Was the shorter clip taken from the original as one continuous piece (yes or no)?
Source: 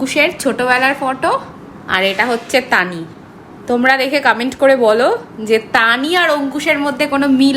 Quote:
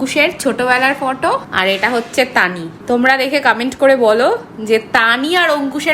no